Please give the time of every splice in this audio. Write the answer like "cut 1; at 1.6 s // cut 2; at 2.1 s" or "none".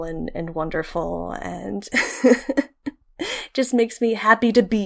cut 1; at 3.0 s